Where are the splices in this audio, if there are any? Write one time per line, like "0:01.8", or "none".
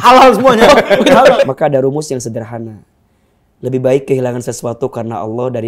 0:01.4